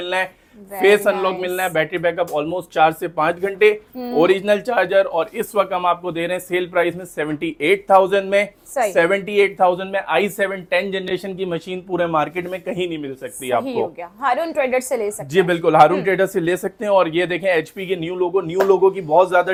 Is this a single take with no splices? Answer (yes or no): yes